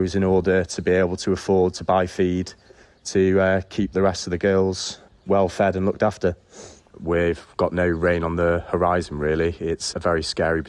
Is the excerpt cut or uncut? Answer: cut